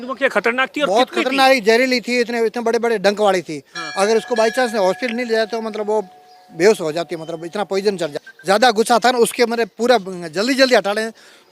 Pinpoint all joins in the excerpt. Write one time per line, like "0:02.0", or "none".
0:08.1

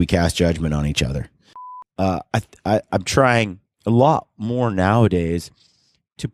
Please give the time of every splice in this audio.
0:01.6

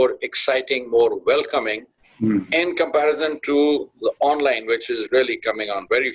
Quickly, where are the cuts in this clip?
none

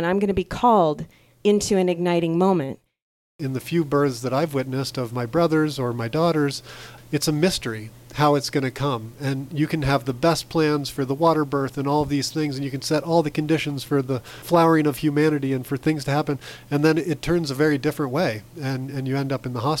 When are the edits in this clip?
0:03.1

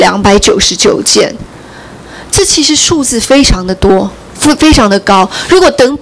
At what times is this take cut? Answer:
none

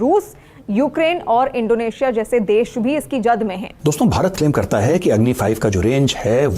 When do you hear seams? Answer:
0:03.7

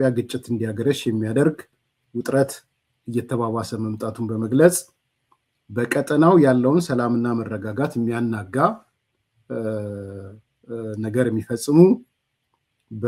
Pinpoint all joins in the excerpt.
none

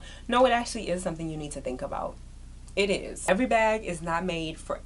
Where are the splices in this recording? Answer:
0:03.2

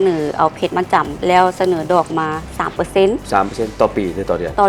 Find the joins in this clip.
none

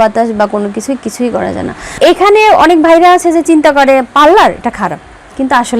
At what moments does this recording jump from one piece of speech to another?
0:01.9

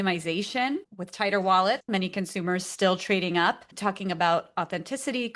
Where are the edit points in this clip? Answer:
0:00.9
0:01.9

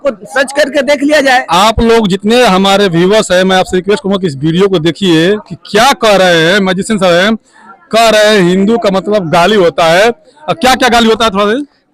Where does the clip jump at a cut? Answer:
none

